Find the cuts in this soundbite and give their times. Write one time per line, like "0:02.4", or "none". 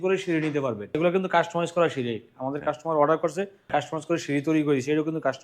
0:00.9
0:03.7